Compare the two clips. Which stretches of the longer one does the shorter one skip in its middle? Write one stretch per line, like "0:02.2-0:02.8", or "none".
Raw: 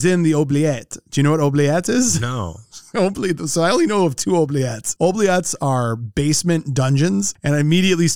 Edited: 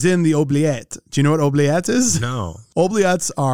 0:02.6-0:04.8

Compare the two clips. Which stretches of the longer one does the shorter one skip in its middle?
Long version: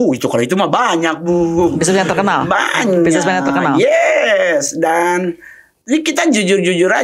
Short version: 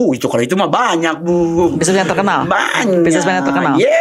none

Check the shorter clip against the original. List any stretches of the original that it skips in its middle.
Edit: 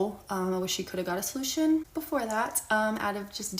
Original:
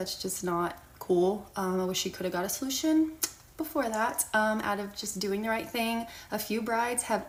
0:03.2-0:03.6

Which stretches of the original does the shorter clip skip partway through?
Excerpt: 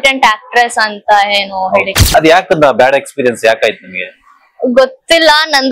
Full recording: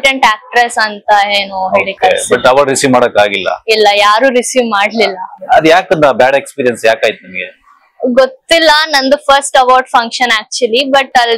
0:01.9-0:05.3

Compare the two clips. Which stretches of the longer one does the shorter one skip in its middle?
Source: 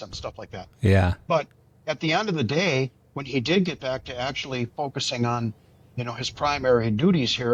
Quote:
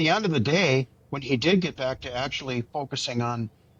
none

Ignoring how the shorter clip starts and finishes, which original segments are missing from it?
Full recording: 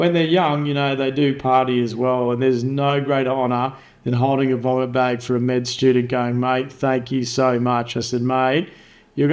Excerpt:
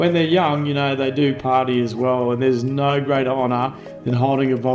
none

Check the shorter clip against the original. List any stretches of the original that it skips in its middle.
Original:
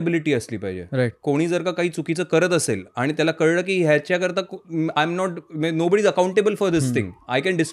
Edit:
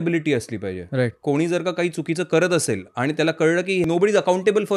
0:03.8-0:05.7

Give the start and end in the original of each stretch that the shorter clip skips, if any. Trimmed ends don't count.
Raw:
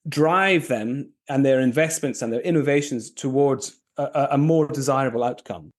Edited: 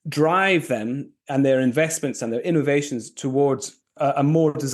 0:03.8-0:04.0

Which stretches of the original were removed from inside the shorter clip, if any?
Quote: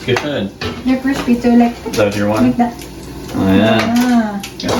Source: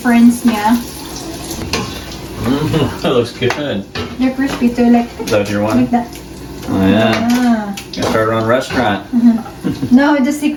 none

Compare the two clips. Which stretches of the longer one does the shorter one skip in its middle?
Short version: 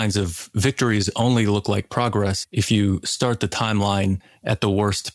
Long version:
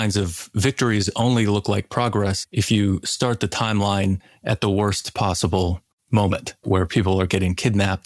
none

